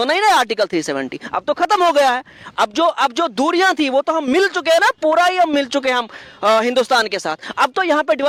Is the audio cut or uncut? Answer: uncut